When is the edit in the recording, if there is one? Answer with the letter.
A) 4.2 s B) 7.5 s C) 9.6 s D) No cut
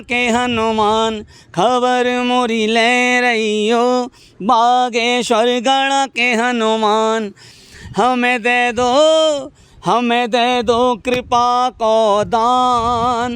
B